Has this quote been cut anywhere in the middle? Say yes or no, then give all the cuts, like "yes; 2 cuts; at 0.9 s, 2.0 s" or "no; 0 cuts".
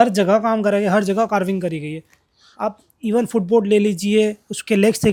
no; 0 cuts